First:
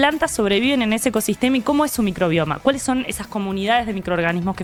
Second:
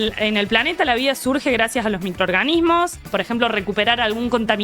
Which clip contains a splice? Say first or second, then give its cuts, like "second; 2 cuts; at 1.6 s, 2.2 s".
second; 1 cut; at 3.0 s